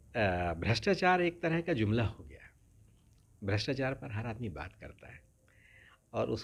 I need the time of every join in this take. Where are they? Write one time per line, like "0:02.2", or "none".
none